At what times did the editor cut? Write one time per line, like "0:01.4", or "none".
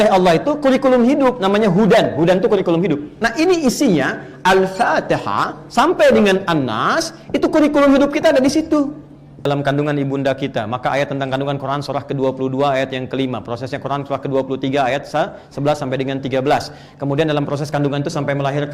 0:03.1
0:09.5